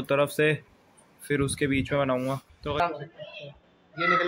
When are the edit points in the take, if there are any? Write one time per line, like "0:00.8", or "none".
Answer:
0:02.8